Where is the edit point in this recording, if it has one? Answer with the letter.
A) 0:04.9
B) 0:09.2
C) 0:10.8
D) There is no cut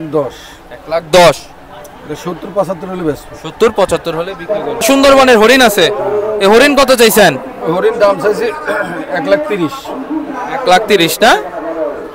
A